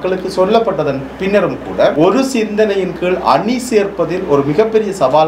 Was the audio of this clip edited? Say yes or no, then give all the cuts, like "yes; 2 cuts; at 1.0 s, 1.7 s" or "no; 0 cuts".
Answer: yes; 1 cut; at 1.9 s